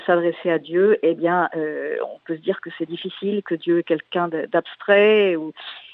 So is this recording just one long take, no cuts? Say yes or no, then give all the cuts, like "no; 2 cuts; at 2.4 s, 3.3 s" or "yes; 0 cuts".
yes; 0 cuts